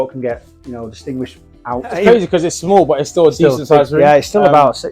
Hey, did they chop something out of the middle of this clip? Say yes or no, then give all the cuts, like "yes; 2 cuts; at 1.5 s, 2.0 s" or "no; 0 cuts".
yes; 1 cut; at 2.0 s